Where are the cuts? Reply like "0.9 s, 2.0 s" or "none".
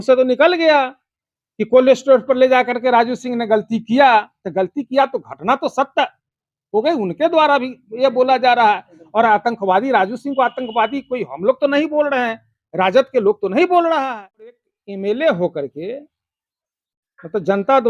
14.5 s